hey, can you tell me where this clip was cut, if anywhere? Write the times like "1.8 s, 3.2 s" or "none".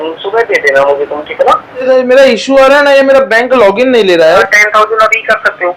1.9 s, 4.4 s